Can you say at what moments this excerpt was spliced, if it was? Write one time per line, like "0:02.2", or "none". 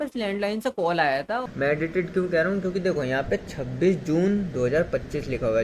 0:01.5